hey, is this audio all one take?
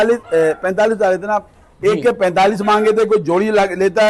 yes; 0 cuts

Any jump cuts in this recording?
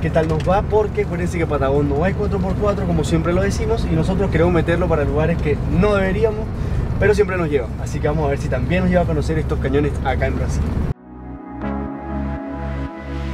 no; 0 cuts

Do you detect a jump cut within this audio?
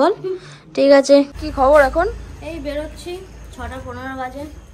yes; 1 cut; at 1.3 s

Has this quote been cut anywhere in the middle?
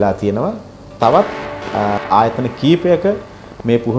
no; 0 cuts

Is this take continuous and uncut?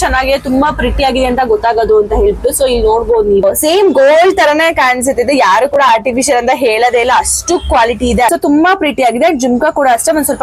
no; 2 cuts; at 3.4 s, 8.3 s

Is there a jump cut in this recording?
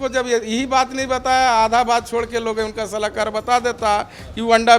no; 0 cuts

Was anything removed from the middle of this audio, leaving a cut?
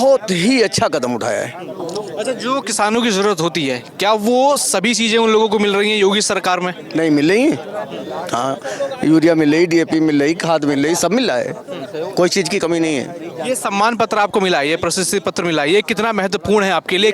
no; 0 cuts

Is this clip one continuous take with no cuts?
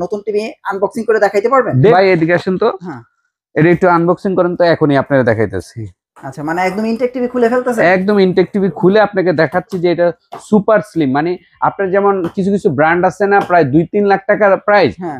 no; 1 cut; at 1.9 s

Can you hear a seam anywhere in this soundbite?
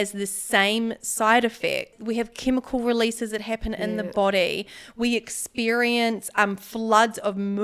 no; 0 cuts

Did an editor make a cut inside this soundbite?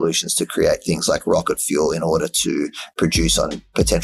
no; 0 cuts

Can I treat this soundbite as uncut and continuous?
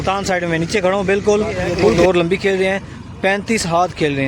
no; 1 cut; at 2.0 s

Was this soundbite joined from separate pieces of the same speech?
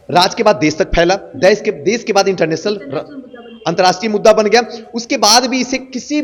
no; 0 cuts

